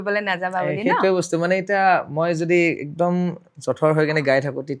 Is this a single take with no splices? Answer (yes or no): yes